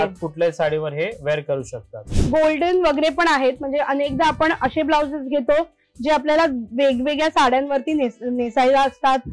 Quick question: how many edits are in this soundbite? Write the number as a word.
one